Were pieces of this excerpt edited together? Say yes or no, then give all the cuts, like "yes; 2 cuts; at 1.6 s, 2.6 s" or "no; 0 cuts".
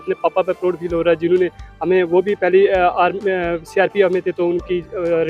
no; 0 cuts